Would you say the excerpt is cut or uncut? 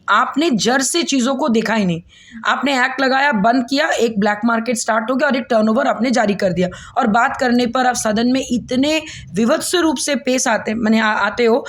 uncut